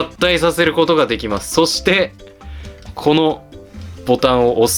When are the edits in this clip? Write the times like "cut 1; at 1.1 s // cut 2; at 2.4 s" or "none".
none